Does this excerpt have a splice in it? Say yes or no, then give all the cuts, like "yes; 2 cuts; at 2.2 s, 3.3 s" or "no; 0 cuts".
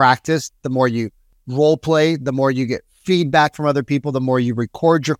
no; 0 cuts